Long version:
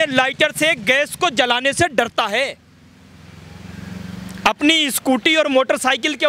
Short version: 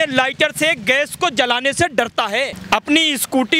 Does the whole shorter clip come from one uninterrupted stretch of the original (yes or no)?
no